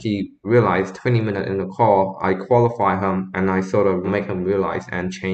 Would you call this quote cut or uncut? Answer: uncut